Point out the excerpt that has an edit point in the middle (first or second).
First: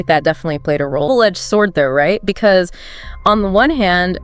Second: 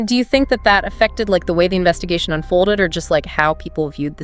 first